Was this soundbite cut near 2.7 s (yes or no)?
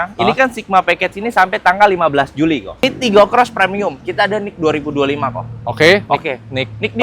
yes